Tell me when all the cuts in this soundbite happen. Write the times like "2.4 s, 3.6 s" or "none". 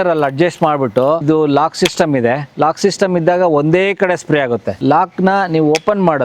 1.2 s, 2.5 s, 4.7 s